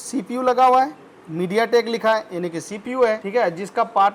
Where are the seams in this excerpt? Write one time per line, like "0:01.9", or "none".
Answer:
none